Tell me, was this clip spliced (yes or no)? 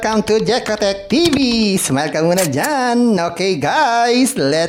no